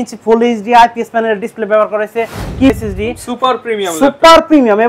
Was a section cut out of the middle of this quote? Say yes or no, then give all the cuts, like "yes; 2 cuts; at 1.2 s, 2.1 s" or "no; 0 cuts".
yes; 1 cut; at 2.7 s